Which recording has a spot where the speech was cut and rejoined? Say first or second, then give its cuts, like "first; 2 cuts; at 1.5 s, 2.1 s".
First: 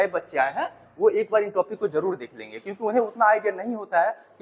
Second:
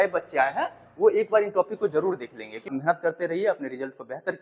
second; 1 cut; at 2.6 s